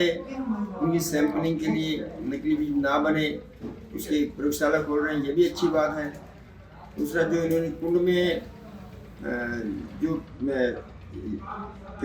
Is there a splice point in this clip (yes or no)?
no